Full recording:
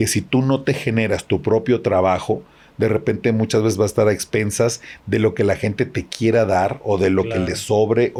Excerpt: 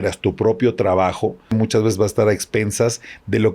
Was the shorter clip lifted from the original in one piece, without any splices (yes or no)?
no